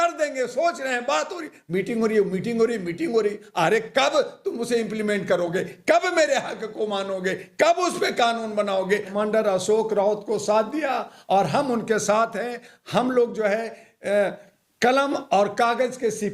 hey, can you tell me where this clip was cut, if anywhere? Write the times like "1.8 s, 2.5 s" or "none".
9.1 s